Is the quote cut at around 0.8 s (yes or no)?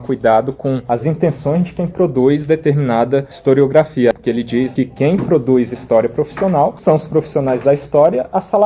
yes